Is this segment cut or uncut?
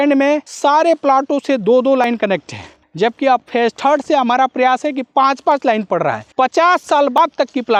uncut